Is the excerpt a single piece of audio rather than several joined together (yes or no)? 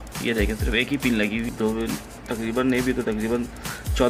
no